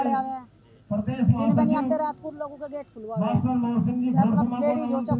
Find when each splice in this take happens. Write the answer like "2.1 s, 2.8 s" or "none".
none

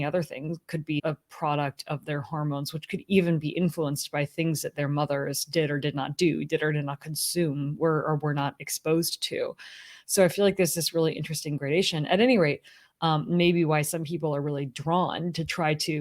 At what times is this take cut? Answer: 1.0 s

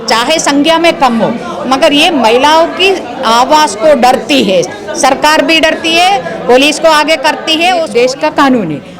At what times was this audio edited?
7.9 s

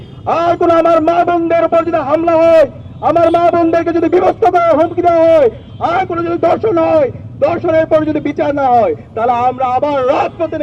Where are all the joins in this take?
none

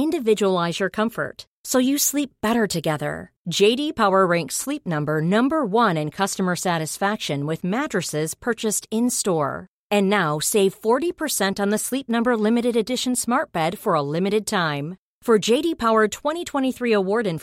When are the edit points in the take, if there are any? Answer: none

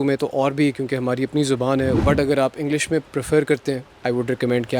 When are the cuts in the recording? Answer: 2.0 s, 3.1 s, 3.9 s

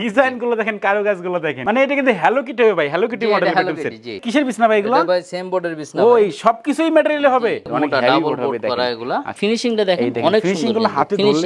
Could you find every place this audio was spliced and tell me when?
4.2 s, 7.7 s, 9.3 s

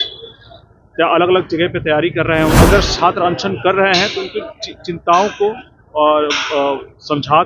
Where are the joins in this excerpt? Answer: 2.6 s

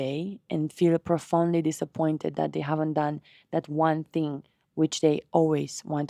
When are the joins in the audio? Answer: none

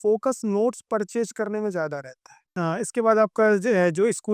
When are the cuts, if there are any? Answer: 2.4 s

